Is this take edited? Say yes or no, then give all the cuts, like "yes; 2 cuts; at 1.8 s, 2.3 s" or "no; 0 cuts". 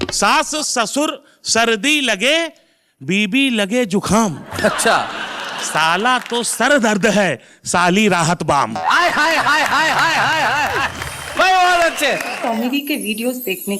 yes; 1 cut; at 12.3 s